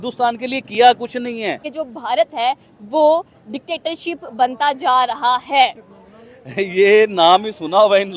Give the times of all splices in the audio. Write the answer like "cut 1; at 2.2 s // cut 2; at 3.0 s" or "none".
cut 1; at 1.7 s